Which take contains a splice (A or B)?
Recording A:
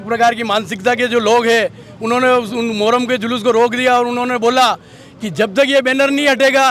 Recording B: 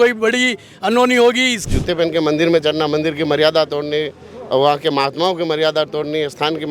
B